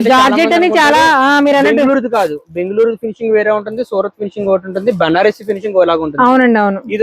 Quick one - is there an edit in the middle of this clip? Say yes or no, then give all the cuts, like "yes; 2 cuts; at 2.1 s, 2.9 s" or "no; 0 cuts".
no; 0 cuts